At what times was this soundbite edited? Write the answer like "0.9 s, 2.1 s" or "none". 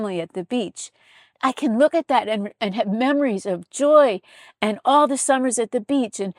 1.4 s